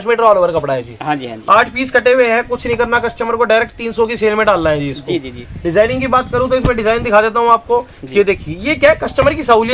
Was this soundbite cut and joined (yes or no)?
no